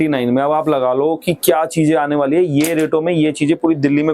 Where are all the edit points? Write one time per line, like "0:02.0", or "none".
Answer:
none